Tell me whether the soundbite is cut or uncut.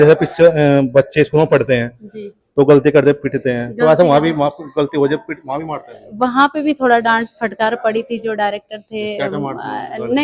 uncut